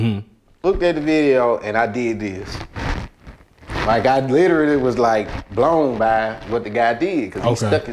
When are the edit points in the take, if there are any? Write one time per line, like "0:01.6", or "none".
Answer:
none